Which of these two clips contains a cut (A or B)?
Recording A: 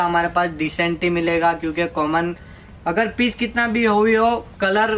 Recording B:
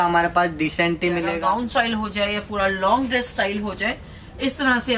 B